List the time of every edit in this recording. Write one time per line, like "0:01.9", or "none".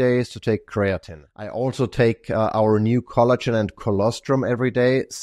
0:01.5